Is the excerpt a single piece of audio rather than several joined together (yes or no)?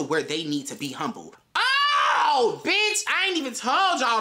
no